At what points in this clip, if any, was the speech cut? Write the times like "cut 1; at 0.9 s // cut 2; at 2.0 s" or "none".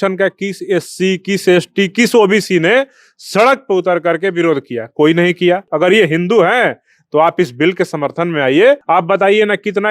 cut 1; at 5.7 s // cut 2; at 8.8 s